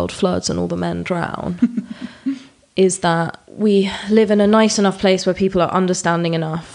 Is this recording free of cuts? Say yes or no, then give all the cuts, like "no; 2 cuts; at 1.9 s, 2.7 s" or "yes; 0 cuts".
no; 1 cut; at 3.4 s